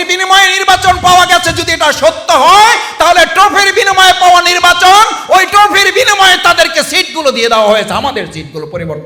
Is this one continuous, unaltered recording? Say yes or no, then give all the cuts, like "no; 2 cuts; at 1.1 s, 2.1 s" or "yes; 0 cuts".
yes; 0 cuts